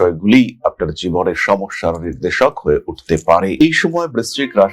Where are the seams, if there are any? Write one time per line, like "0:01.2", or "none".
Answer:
none